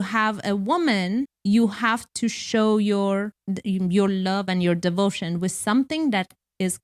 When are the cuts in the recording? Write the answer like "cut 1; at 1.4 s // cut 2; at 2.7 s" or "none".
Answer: cut 1; at 1.3 s // cut 2; at 3.4 s